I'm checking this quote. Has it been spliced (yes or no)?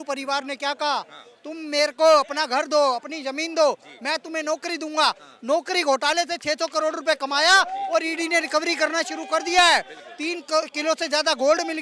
no